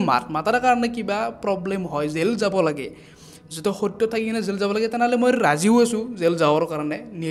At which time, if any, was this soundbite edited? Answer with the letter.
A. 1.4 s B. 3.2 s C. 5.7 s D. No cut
D